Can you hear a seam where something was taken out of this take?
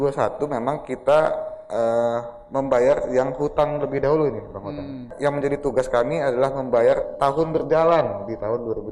yes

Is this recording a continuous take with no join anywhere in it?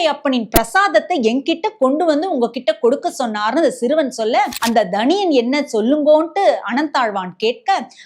no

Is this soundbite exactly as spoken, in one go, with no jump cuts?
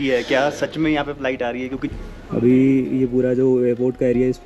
no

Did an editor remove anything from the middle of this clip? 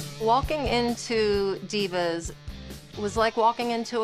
no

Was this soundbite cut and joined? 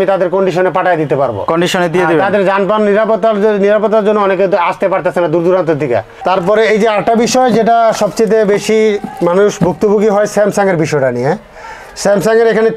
yes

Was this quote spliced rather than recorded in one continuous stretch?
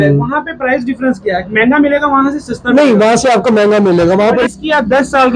yes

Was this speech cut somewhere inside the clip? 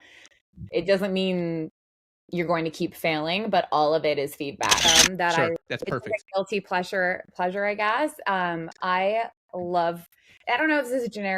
yes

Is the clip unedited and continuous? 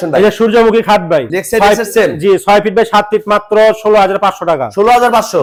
yes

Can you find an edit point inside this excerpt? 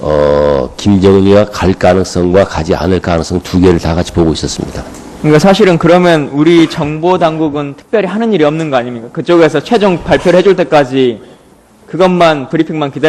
no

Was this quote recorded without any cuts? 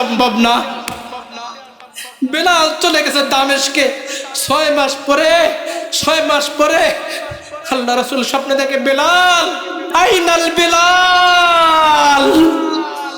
no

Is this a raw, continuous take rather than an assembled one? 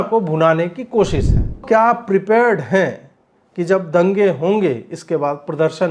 no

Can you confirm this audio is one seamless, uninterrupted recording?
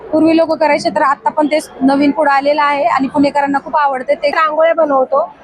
no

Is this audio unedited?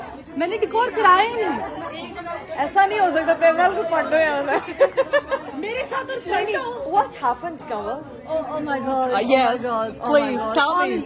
yes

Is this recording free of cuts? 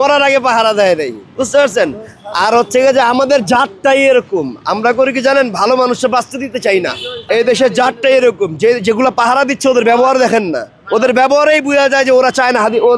yes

